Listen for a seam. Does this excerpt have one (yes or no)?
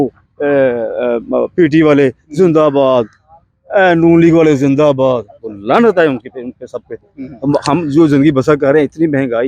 no